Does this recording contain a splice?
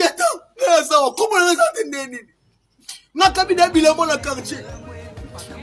yes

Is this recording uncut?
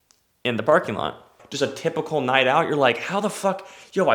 no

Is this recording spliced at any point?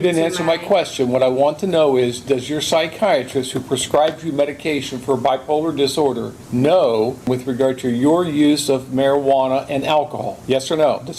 yes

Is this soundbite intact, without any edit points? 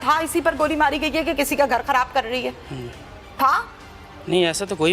yes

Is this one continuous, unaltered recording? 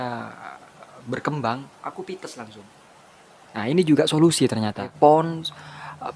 no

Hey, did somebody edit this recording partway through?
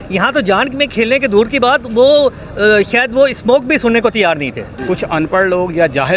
yes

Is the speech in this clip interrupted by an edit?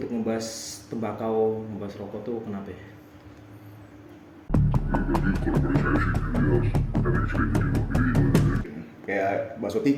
no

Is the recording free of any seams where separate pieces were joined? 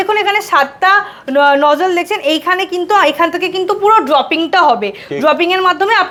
yes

